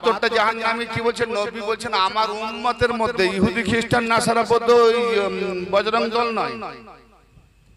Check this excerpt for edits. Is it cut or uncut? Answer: uncut